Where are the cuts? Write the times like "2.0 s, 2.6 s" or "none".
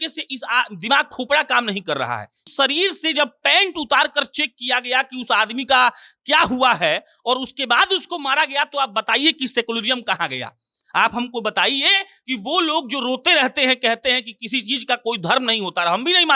2.4 s

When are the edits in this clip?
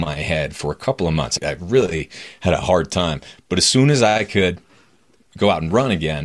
1.3 s

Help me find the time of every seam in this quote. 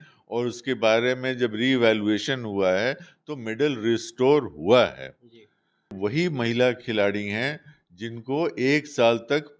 5.9 s

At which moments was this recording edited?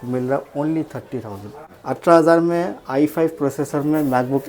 1.6 s

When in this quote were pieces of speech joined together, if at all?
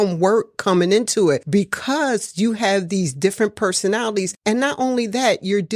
1.4 s, 4.3 s

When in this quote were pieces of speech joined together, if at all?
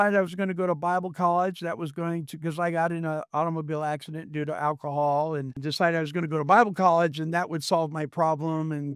5.6 s

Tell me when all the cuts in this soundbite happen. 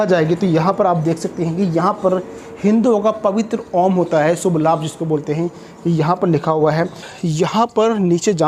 7.0 s

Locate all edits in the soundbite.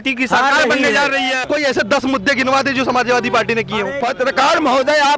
1.4 s, 4.0 s

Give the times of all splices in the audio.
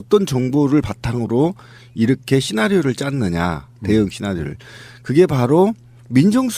3.1 s

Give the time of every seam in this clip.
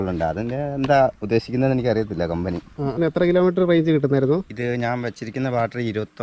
3.0 s

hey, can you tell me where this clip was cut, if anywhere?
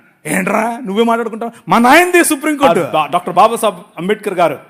2.8 s

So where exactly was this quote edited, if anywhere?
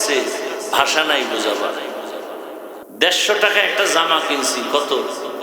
2.8 s

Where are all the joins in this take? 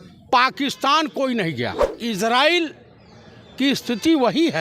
1.9 s

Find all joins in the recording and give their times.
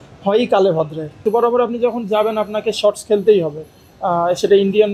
1.2 s

